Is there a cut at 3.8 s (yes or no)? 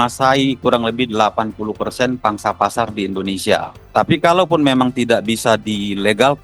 yes